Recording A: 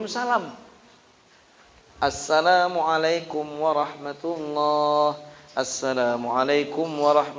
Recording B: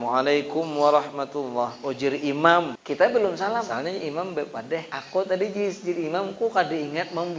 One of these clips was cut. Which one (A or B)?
B